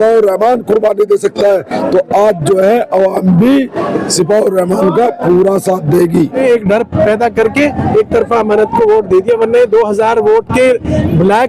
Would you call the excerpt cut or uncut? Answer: cut